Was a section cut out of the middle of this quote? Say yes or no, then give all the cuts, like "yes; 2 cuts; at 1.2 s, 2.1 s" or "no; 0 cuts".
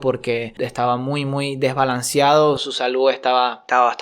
no; 0 cuts